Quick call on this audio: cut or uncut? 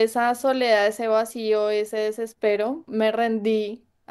cut